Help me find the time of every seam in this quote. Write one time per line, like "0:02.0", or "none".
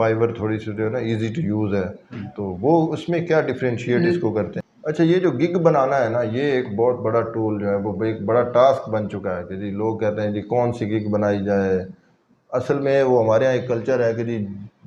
0:04.5